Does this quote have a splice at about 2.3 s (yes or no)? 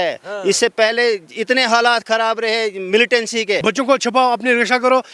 no